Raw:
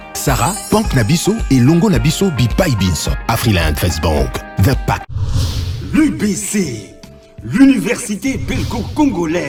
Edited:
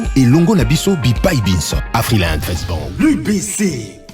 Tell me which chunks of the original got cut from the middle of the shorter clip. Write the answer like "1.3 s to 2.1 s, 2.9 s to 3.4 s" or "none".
3.9 s to 5.5 s